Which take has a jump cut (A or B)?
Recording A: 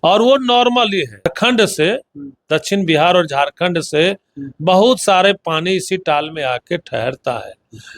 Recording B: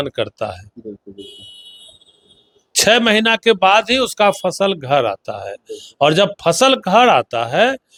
A